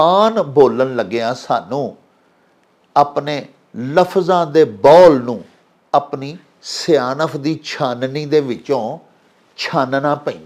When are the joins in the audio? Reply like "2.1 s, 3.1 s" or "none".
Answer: none

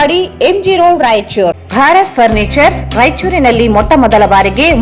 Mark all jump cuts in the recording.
1.6 s

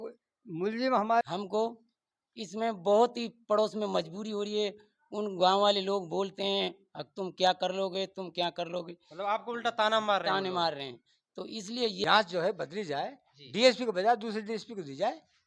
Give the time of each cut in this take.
1.3 s, 12.0 s

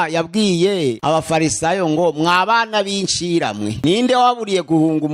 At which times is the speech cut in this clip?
1.0 s, 3.8 s

